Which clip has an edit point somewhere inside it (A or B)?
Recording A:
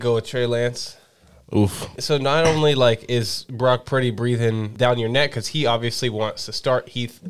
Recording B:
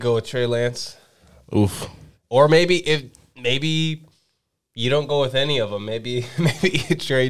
A